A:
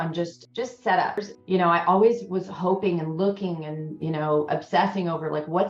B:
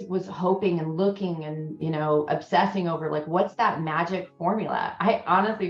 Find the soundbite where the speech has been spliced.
A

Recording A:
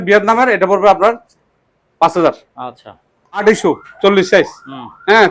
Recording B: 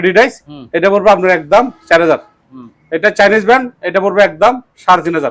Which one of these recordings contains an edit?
A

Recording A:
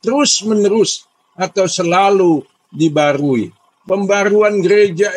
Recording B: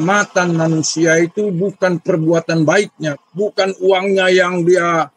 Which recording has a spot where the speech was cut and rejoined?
A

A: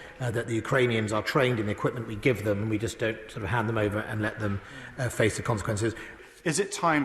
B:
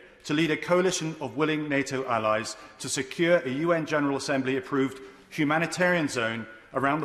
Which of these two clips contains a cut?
A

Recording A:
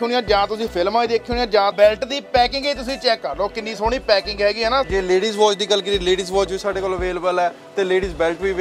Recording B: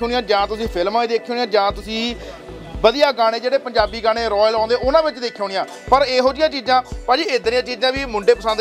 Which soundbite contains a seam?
A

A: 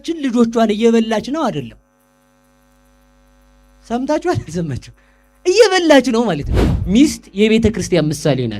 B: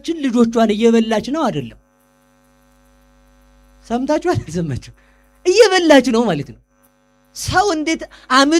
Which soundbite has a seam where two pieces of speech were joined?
A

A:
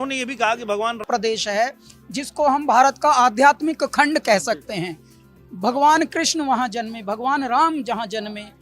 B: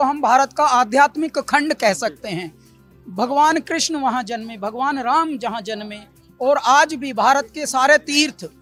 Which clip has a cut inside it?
A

